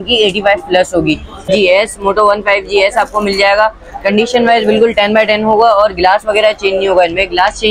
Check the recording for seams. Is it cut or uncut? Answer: cut